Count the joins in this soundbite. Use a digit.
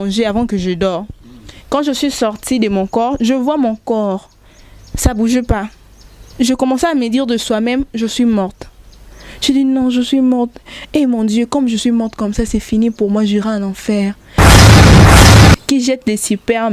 2